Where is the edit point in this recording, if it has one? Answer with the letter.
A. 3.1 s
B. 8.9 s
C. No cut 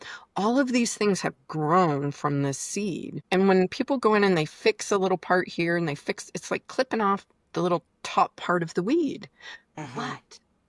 A